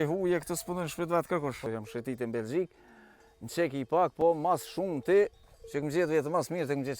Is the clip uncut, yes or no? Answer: no